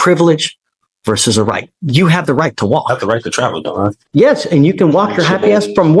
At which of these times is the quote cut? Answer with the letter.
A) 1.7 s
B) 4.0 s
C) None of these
B